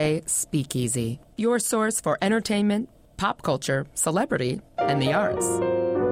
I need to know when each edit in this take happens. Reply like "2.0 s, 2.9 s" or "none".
none